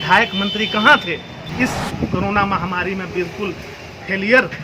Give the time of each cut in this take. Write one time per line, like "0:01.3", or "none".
0:01.5